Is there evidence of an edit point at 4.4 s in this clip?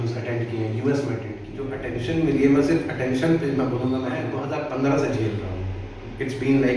yes; 2 cuts; at 1.8 s, 4.4 s

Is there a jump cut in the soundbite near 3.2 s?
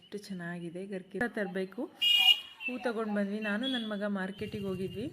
no; 1 cut; at 1.2 s

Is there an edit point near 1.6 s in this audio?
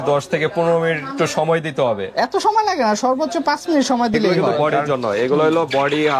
no; 1 cut; at 4.3 s

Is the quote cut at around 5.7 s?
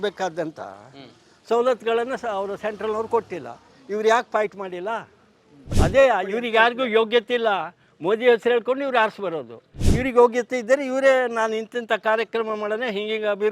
yes; 1 cut; at 5.7 s

